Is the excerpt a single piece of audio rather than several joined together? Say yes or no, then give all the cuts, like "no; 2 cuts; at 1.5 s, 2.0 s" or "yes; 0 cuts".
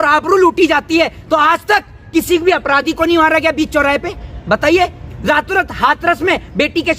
yes; 0 cuts